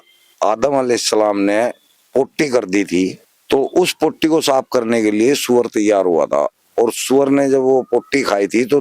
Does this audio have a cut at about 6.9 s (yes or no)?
no